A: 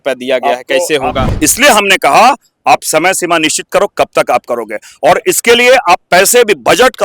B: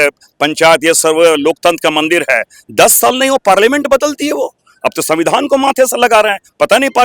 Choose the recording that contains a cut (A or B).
A